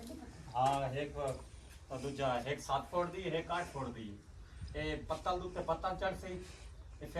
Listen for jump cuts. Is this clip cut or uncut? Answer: uncut